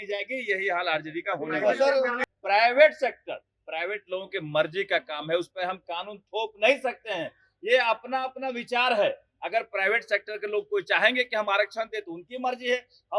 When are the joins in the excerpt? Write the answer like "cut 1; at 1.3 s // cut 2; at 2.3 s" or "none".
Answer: cut 1; at 2.2 s